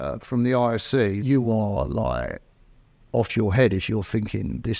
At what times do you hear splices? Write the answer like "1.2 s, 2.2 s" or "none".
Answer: 1.2 s